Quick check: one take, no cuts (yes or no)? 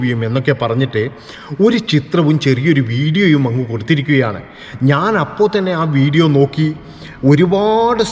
yes